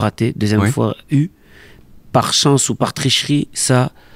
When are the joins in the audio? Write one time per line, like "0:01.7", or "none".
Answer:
none